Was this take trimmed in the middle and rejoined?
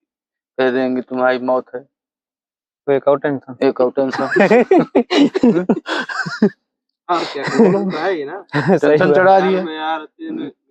no; 0 cuts

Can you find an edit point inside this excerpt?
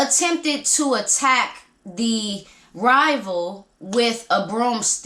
no; 0 cuts

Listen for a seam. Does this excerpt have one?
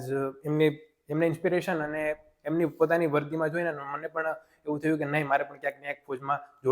no; 0 cuts

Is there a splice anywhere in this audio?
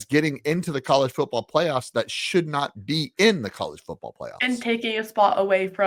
no; 0 cuts

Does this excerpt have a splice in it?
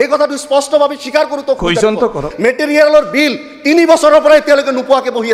yes; 1 cut; at 2.3 s

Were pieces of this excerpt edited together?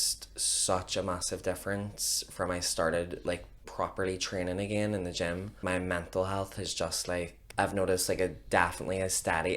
yes; 2 cuts; at 5.6 s, 7.4 s

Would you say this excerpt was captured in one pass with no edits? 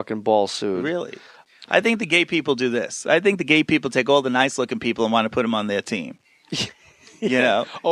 no; 1 cut; at 2.7 s

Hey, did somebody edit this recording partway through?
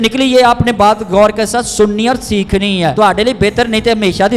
yes; 1 cut; at 2.9 s

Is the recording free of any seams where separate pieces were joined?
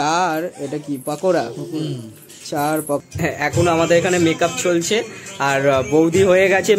no; 1 cut; at 3.0 s

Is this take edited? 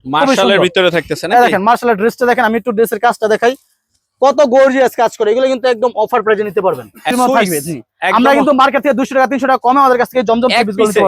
yes; 1 cut; at 7.1 s

